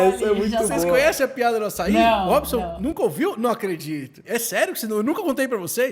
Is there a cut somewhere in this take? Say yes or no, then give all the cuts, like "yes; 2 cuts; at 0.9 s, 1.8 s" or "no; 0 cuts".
yes; 1 cut; at 4.5 s